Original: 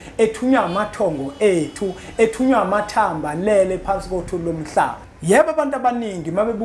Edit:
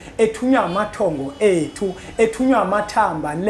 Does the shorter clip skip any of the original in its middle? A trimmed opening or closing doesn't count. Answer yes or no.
no